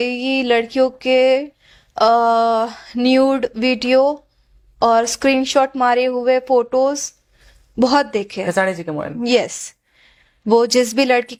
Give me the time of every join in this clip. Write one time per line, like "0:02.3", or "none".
none